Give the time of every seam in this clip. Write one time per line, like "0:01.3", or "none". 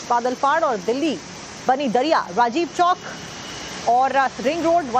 none